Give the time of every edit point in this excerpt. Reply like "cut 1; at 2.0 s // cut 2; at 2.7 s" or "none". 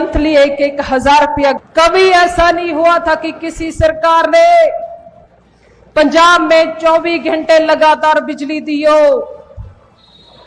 cut 1; at 1.6 s